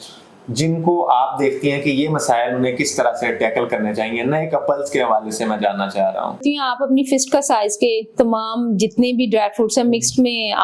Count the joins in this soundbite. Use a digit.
1